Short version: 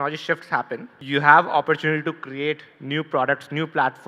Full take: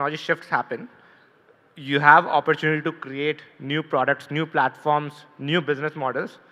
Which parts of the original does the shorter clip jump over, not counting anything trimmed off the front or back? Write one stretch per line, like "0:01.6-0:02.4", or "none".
0:00.9-0:01.7